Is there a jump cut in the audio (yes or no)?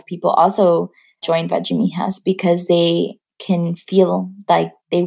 no